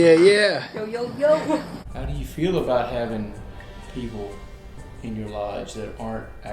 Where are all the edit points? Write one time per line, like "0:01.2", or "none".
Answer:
0:01.8